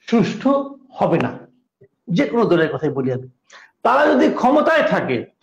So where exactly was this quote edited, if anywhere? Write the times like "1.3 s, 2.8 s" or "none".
2.0 s